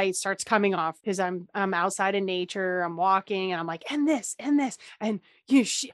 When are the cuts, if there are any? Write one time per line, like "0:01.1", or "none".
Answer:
0:01.0
0:04.9